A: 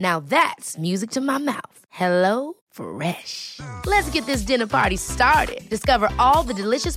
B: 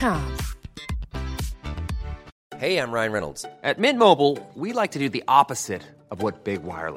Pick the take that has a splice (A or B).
B